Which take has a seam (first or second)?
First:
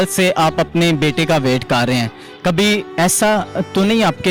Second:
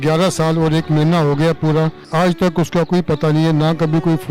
second